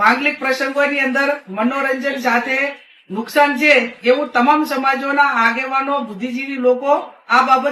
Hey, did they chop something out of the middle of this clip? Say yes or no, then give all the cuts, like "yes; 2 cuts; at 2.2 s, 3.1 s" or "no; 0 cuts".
no; 0 cuts